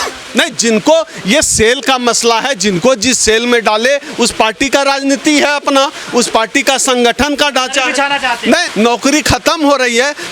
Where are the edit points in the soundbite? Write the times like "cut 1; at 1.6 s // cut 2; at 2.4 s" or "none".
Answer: cut 1; at 8.7 s